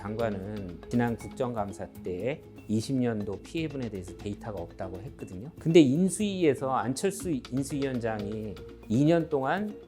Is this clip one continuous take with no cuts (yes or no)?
no